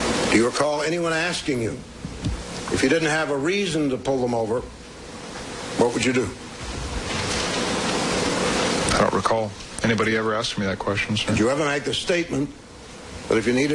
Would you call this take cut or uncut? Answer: uncut